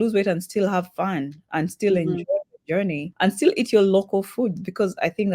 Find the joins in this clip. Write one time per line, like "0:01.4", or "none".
0:03.1